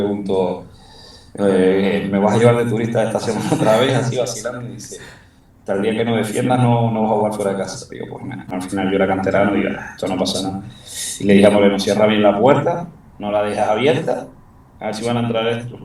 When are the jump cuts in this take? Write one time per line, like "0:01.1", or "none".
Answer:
0:08.5